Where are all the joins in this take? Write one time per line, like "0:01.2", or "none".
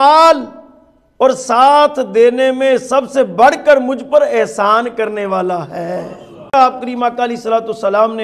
0:06.5

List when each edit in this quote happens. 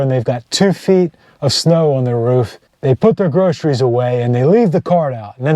0:02.6

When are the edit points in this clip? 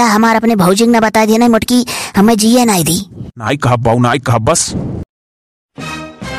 none

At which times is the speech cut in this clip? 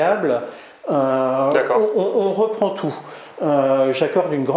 none

